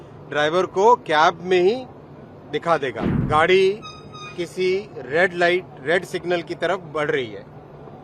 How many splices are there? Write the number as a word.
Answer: one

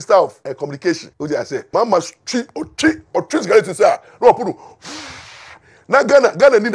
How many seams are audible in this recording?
one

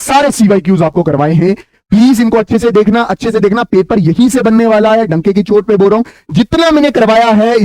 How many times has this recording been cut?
zero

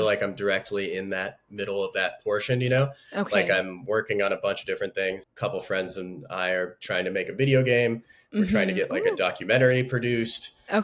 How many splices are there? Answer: one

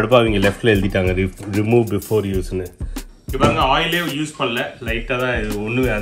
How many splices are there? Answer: one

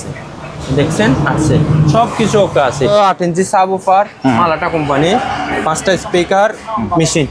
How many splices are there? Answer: one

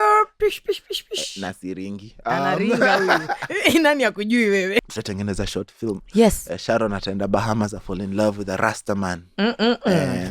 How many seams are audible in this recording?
one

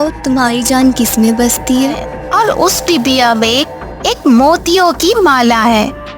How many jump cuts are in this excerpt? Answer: one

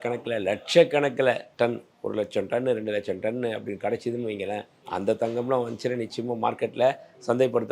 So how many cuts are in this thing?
two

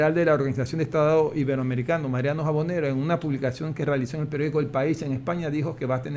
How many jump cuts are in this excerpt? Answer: zero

